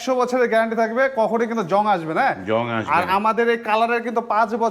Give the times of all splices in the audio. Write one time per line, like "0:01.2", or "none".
none